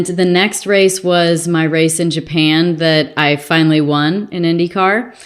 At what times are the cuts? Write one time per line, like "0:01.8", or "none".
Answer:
none